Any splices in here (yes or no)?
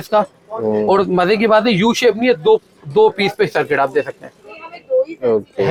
no